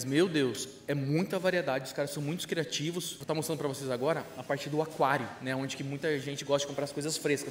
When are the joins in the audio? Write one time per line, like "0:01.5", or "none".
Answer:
0:03.2